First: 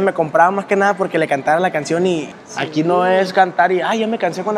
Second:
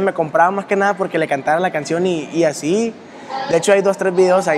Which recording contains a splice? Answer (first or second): first